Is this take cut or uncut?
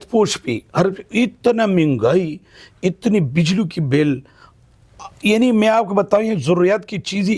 uncut